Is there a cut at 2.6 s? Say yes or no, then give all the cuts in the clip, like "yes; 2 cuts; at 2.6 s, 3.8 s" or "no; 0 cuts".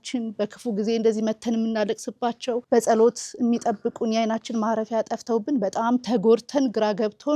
yes; 1 cut; at 2.6 s